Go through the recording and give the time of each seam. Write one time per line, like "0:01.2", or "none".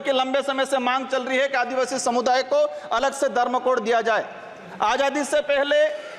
none